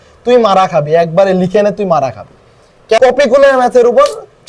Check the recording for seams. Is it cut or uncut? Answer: cut